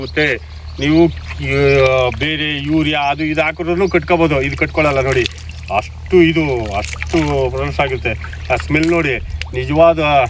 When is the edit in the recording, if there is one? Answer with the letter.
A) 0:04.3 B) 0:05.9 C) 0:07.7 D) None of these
D